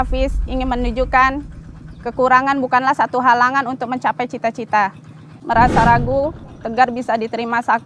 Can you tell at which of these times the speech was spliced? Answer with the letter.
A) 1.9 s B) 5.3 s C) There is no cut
B